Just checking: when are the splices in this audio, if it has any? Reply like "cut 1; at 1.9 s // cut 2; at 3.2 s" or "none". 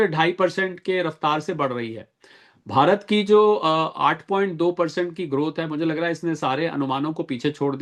none